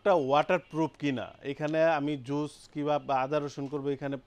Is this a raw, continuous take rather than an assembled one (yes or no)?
yes